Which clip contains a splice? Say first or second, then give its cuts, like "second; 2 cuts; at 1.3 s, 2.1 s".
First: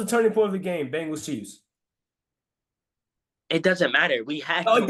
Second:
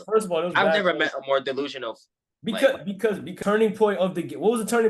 second; 1 cut; at 3.3 s